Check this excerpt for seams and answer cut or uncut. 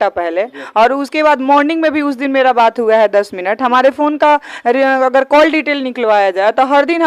uncut